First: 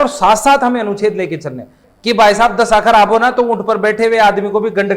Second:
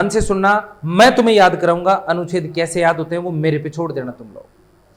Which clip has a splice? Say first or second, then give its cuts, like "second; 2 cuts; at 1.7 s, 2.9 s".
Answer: first; 1 cut; at 1.8 s